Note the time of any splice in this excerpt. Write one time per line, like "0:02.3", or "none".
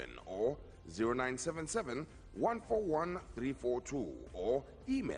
0:01.1

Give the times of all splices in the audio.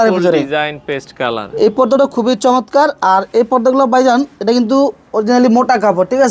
none

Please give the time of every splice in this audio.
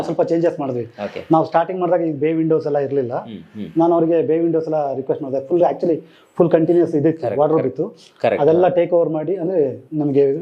none

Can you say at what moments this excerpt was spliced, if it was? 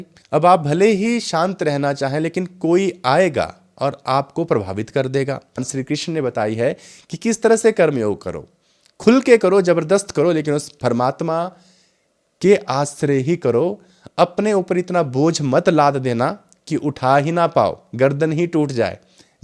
0:05.7

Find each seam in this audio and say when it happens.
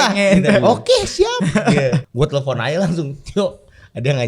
0:02.1

